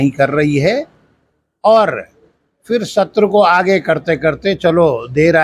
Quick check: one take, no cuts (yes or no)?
yes